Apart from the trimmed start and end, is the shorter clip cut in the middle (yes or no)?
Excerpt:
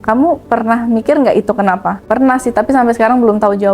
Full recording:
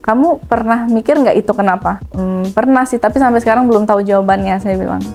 yes